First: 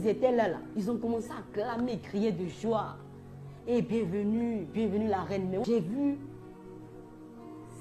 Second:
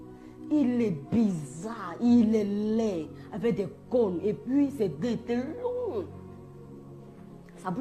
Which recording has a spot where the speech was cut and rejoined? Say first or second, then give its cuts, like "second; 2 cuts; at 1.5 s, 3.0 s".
first; 1 cut; at 5.6 s